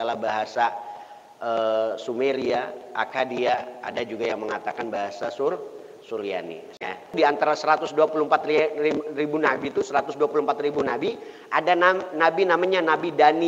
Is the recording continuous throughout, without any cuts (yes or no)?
no